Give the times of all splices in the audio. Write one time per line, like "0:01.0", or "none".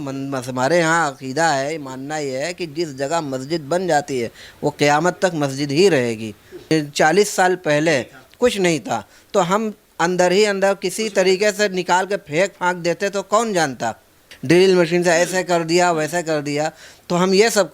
0:06.6
0:14.3